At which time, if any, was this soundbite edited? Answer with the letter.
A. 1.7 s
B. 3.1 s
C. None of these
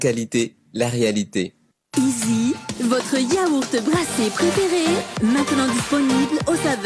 A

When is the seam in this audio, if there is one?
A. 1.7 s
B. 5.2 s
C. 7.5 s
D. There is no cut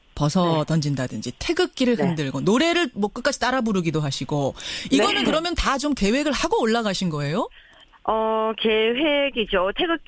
B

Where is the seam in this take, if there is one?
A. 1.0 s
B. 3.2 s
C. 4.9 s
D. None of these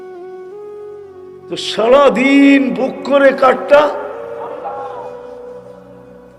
A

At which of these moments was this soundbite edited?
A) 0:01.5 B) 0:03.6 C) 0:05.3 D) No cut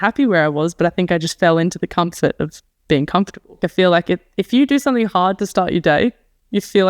B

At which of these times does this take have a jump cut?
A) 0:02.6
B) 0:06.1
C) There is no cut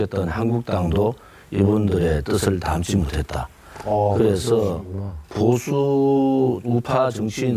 C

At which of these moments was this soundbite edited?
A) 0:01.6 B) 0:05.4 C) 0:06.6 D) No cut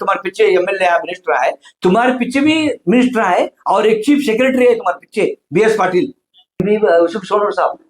C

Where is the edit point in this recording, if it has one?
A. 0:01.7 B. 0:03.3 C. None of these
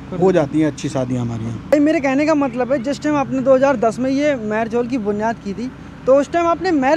A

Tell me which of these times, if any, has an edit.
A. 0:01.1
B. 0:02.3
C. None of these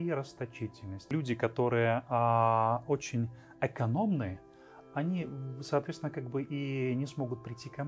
A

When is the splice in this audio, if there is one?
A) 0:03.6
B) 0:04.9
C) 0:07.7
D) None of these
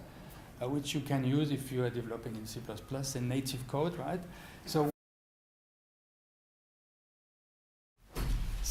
D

